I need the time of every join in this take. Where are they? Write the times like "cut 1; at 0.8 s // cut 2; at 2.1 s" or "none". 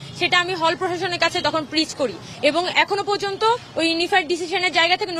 none

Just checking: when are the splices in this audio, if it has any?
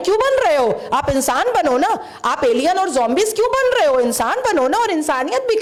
none

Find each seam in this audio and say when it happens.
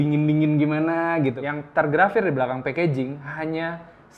cut 1; at 1.4 s

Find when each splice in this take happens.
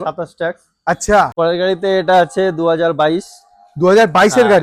cut 1; at 1.3 s

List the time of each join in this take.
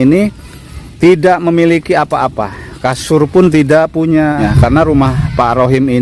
cut 1; at 4.5 s

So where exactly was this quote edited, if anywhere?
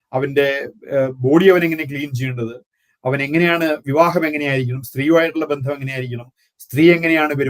none

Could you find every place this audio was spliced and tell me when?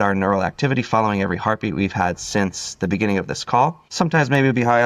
cut 1; at 3.8 s

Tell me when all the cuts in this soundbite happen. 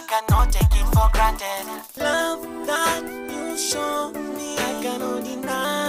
none

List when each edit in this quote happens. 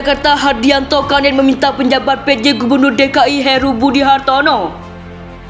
none

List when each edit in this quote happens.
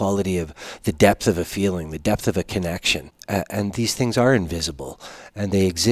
cut 1; at 3.1 s

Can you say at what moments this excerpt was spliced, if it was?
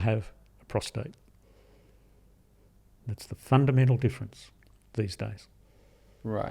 none

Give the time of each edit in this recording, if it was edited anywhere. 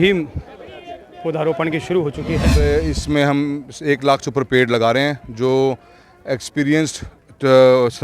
cut 1; at 2.5 s

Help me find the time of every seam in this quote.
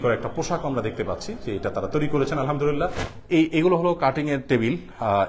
cut 1; at 3.1 s

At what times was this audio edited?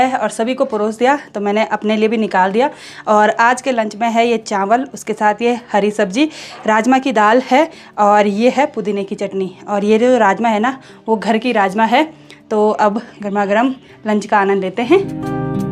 none

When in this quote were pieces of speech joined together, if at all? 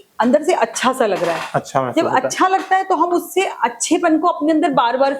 none

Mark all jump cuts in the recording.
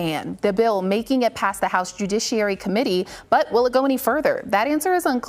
none

